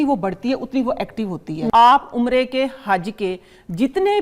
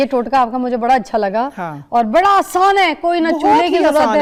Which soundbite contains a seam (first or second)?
first